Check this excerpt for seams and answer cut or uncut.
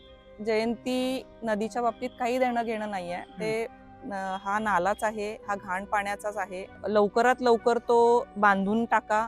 cut